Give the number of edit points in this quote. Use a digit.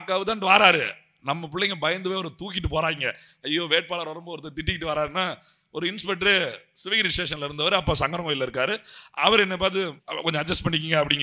1